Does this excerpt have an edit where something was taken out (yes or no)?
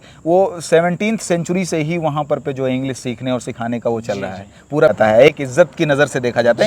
yes